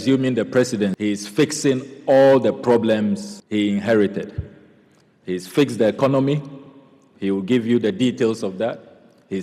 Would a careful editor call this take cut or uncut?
cut